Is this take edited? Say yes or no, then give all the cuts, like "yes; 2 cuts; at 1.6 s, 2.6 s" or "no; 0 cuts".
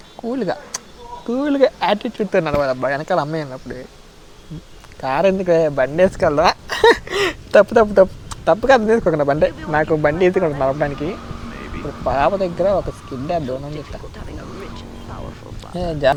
no; 0 cuts